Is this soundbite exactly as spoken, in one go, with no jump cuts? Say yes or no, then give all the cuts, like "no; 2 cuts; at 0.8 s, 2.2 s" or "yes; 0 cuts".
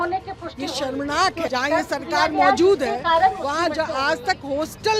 no; 1 cut; at 1.4 s